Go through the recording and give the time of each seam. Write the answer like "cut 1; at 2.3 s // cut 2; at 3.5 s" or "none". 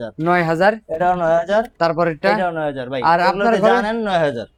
none